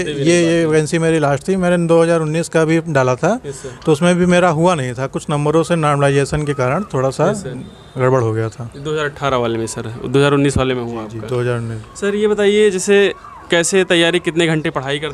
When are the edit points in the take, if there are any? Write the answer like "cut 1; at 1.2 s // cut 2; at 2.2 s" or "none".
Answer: none